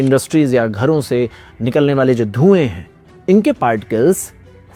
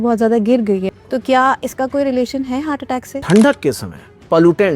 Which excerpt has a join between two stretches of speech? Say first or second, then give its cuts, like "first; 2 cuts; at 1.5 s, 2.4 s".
second; 2 cuts; at 0.9 s, 3.1 s